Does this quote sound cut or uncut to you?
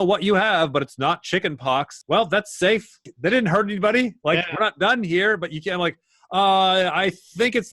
cut